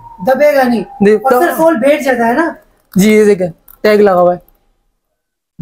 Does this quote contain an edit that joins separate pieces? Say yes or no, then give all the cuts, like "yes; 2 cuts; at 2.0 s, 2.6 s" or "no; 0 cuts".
no; 0 cuts